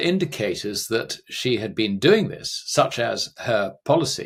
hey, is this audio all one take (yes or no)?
yes